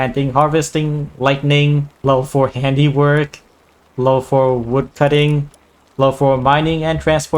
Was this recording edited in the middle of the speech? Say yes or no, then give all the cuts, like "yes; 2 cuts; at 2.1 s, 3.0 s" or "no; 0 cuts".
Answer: yes; 2 cuts; at 2.0 s, 4.9 s